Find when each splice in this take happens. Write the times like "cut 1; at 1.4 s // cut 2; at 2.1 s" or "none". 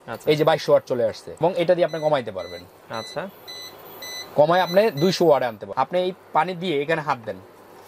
cut 1; at 1.4 s // cut 2; at 5.6 s